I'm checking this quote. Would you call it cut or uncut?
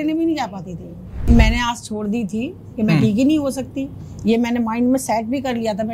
cut